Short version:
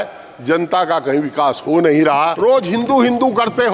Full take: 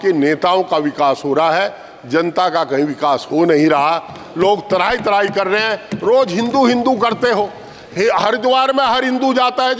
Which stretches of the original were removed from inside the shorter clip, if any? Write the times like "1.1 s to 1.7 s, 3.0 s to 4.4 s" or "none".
4.0 s to 6.0 s